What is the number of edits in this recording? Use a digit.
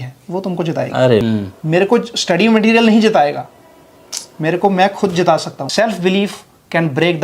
2